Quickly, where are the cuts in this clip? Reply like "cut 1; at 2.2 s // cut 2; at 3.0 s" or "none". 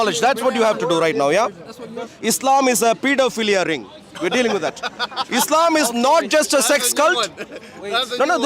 cut 1; at 2.1 s

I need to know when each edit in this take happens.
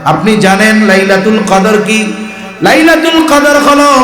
cut 1; at 1.5 s

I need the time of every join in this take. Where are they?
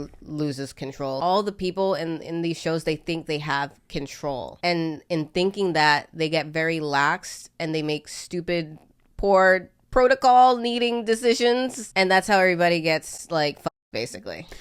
cut 1; at 1.2 s // cut 2; at 4.6 s // cut 3; at 11.8 s

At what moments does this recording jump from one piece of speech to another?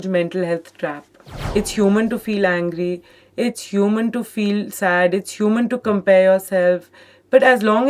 cut 1; at 1.4 s

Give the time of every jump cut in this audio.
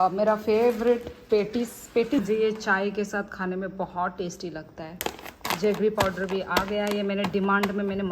cut 1; at 2.2 s // cut 2; at 5.0 s

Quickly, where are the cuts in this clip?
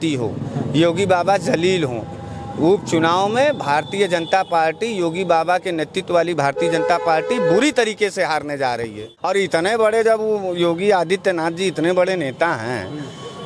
cut 1; at 9.1 s

